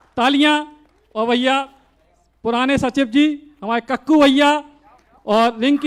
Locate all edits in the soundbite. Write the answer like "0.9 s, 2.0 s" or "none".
none